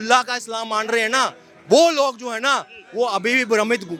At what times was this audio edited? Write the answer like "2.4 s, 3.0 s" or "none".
none